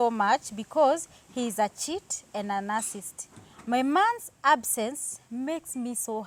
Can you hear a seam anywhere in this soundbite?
no; 0 cuts

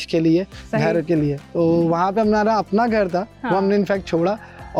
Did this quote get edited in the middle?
no; 0 cuts

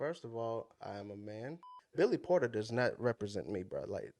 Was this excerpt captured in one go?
no; 1 cut; at 1.7 s

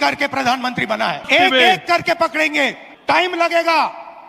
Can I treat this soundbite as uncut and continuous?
no; 2 cuts; at 1.2 s, 2.8 s

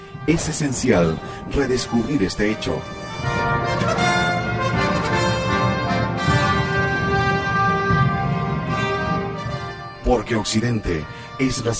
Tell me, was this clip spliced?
yes; 1 cut; at 6.4 s

